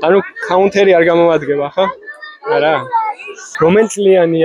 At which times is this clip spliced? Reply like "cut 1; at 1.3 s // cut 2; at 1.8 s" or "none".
cut 1; at 3.4 s